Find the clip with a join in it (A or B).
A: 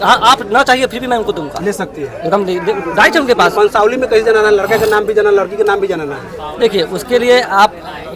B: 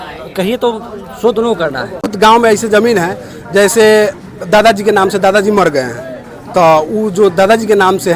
B